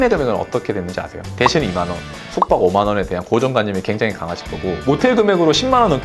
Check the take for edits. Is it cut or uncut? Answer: uncut